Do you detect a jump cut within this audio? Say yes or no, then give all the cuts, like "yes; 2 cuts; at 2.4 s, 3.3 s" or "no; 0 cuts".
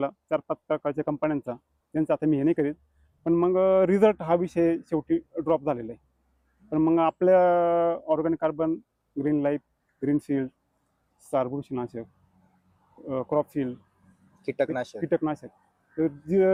no; 0 cuts